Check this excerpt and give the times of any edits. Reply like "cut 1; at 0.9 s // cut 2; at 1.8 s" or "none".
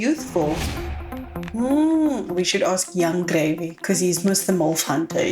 cut 1; at 1.0 s